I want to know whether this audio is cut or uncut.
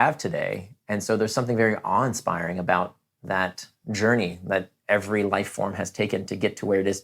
uncut